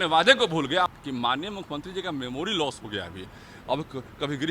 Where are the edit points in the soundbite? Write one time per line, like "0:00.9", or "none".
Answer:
0:01.0